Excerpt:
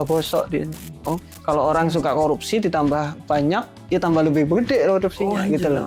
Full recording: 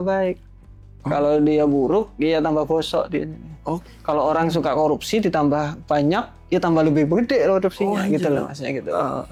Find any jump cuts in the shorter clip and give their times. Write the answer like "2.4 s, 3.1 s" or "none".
none